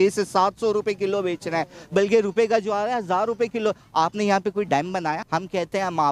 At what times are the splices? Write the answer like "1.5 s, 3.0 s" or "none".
5.2 s